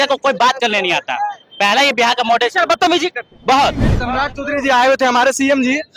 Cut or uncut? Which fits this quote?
cut